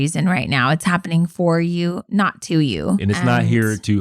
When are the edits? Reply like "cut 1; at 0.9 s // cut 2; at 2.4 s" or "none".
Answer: cut 1; at 3.0 s